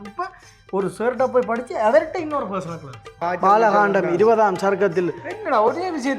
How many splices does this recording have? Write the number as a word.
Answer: one